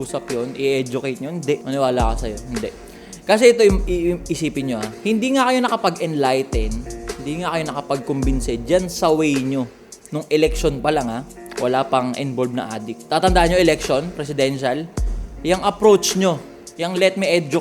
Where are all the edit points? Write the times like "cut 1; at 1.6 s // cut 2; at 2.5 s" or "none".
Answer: cut 1; at 1.6 s // cut 2; at 4.9 s // cut 3; at 12.9 s